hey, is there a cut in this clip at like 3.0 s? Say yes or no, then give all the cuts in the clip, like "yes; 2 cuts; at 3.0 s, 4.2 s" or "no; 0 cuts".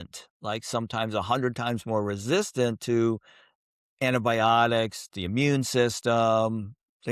no; 0 cuts